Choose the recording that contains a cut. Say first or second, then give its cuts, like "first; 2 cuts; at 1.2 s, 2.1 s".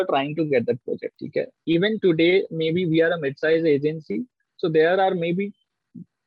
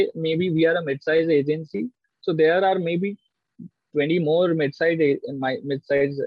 first; 1 cut; at 1.1 s